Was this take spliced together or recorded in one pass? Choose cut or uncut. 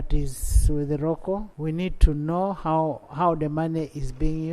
cut